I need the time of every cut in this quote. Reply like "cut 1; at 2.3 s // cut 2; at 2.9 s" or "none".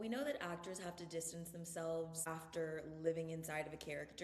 cut 1; at 2.2 s